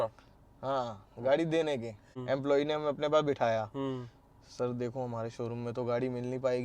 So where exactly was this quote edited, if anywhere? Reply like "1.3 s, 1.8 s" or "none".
2.1 s